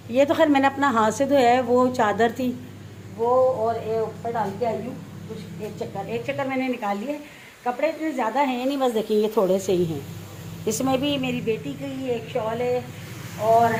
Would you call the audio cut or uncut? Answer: uncut